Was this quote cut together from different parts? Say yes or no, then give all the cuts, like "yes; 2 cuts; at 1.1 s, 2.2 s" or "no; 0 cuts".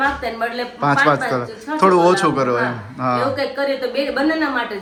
no; 0 cuts